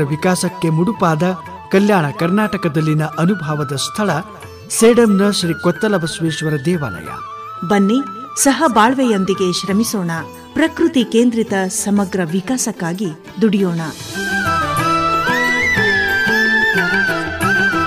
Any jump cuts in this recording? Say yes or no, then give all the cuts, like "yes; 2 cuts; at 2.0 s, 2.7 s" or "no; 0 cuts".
no; 0 cuts